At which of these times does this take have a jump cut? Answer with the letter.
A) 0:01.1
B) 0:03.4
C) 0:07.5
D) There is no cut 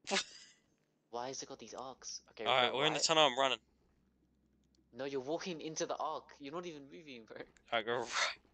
A